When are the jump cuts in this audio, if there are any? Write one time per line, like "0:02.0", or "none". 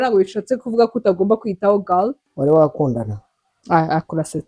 0:02.2